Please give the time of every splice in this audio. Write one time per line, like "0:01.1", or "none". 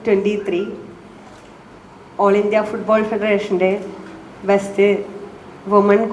none